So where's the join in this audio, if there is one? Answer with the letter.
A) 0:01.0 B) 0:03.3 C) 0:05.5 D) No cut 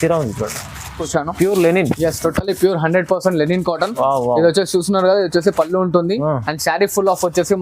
A